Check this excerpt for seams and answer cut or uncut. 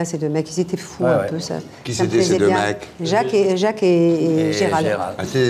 uncut